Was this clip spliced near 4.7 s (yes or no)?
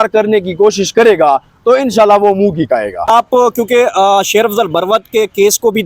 no